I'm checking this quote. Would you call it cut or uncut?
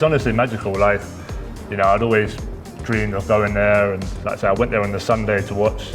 uncut